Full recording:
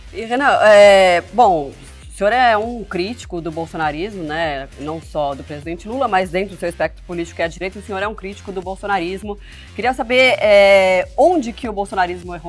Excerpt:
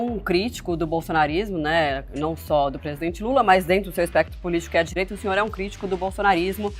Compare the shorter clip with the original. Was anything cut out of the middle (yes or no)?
no